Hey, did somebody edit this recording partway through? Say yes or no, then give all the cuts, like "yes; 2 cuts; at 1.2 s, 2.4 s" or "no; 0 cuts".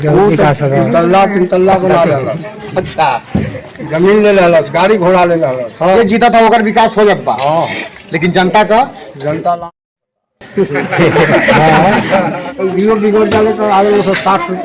no; 0 cuts